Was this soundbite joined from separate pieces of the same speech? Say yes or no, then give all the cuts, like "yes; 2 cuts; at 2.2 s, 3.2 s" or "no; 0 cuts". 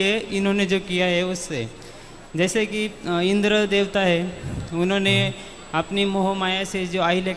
no; 0 cuts